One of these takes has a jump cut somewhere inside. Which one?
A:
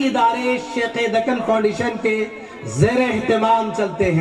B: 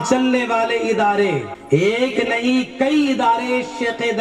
B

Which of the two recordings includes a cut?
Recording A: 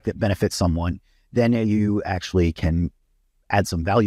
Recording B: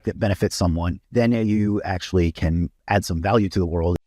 B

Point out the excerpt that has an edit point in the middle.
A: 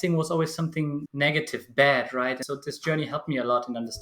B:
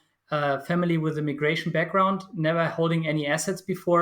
A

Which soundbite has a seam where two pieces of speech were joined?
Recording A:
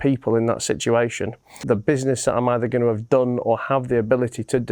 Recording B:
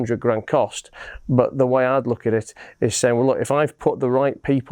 A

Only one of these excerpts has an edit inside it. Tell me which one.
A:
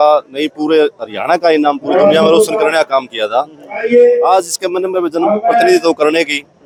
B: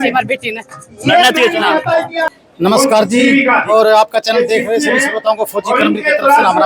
B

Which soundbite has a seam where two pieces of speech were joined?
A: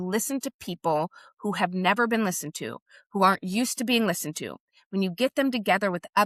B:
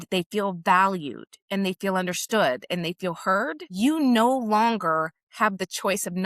B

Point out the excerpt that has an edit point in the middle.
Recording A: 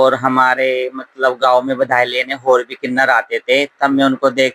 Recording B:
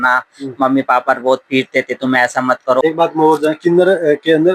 B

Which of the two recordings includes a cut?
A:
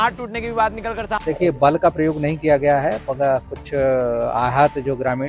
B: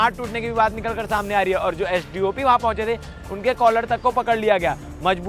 A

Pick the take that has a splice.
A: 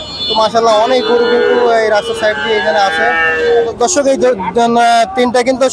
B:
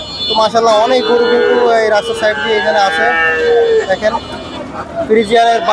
A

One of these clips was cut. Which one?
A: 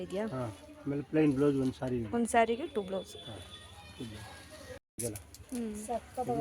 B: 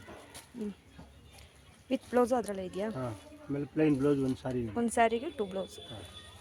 A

